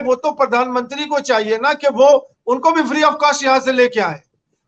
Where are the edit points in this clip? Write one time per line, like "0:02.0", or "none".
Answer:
none